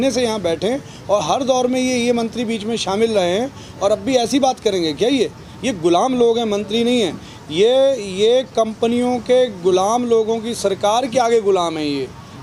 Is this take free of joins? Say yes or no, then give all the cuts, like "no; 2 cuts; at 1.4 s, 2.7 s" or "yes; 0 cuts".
yes; 0 cuts